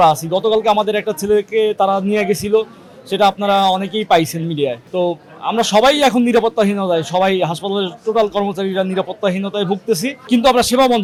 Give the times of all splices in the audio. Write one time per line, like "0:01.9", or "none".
none